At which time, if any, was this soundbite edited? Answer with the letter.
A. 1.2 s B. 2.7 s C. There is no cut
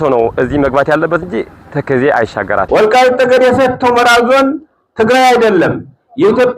B